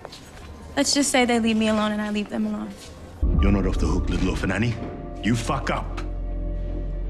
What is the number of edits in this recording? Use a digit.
1